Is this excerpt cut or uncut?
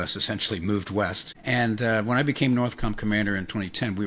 cut